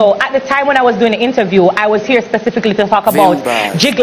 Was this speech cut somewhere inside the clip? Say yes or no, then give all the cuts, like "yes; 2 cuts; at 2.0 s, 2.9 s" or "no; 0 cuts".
no; 0 cuts